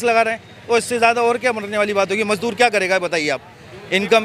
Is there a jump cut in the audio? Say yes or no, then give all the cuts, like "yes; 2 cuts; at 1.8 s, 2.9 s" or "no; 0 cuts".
no; 0 cuts